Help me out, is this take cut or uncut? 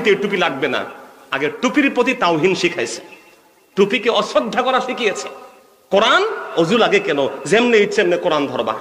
uncut